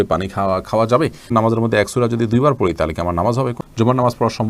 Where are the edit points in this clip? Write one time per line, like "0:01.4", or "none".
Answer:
0:01.3
0:03.6